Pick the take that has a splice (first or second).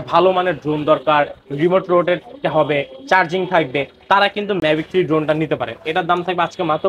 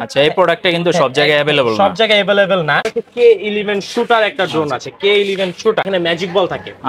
second